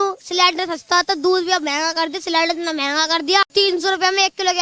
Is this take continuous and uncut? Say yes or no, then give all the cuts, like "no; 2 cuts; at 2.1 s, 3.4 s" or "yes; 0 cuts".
no; 1 cut; at 3.5 s